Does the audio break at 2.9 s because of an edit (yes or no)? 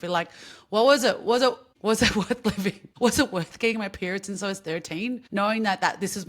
yes